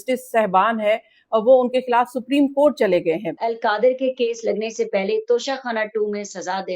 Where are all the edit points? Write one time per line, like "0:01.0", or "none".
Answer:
0:03.3